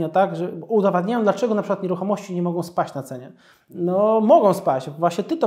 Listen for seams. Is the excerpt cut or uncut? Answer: uncut